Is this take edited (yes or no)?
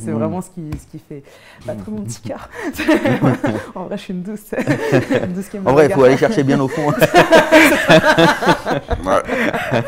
no